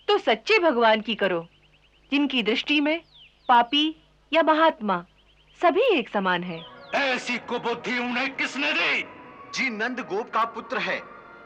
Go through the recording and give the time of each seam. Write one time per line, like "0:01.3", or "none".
0:06.7